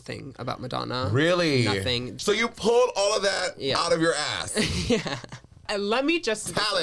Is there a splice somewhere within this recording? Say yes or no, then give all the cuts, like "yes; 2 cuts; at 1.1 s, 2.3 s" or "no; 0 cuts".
yes; 2 cuts; at 2.1 s, 5.7 s